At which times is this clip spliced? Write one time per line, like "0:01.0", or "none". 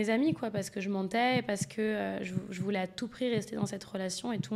none